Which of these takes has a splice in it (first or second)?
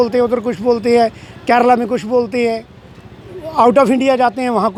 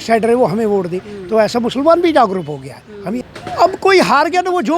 second